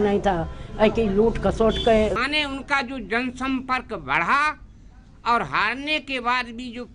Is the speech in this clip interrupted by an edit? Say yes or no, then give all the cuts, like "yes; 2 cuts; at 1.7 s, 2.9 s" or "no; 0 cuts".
yes; 1 cut; at 2.2 s